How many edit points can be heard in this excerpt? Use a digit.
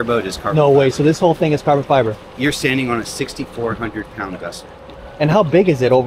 0